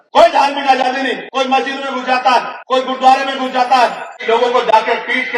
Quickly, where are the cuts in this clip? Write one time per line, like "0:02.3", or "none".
0:01.2
0:02.6
0:04.1